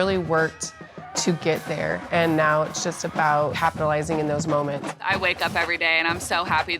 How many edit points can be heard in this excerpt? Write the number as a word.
two